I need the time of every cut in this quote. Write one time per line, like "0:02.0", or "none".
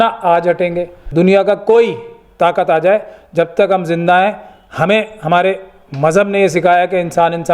0:01.0